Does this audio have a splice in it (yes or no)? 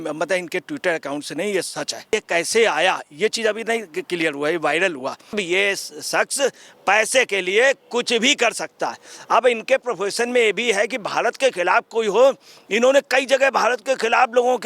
yes